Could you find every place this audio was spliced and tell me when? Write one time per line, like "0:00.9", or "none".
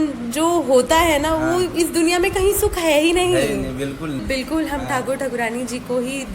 0:04.2